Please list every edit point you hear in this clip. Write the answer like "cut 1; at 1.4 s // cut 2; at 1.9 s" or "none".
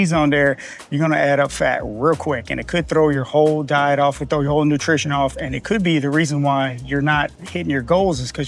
none